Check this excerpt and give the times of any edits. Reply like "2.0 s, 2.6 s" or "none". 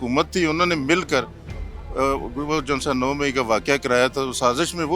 none